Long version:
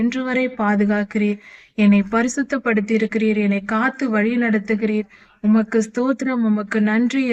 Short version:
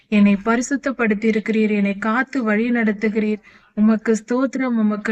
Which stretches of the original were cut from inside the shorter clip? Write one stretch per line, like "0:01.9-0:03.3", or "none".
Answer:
none